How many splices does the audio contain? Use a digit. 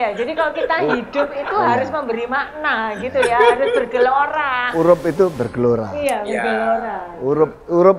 1